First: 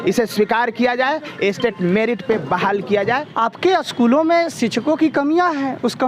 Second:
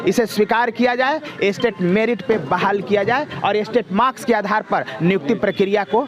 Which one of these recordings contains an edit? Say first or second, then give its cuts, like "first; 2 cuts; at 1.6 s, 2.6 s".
first; 1 cut; at 3.3 s